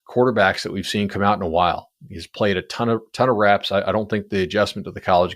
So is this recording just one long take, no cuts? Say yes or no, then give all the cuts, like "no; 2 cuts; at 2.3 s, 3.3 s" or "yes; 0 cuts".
yes; 0 cuts